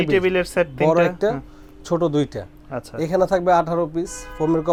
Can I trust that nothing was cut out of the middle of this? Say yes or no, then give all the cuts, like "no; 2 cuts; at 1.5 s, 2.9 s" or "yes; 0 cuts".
yes; 0 cuts